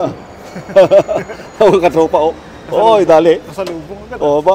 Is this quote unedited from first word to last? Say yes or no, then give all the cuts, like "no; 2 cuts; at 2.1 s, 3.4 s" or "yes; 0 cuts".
yes; 0 cuts